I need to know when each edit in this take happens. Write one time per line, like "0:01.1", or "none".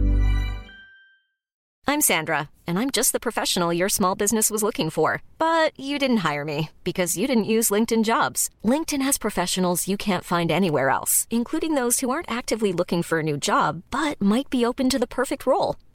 none

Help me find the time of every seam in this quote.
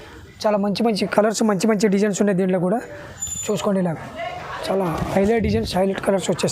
none

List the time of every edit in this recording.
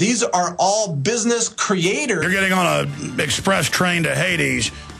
none

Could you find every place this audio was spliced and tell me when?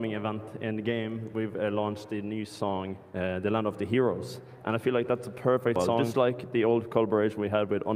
0:06.0

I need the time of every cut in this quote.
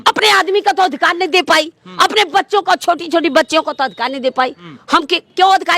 0:04.6

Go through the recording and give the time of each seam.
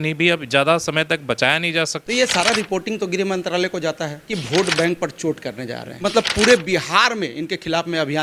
0:02.0
0:04.2
0:05.8

